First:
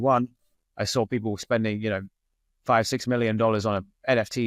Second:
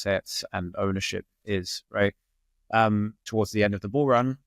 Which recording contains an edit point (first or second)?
second